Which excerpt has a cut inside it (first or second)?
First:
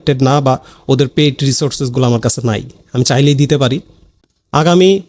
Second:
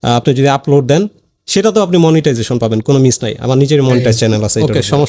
first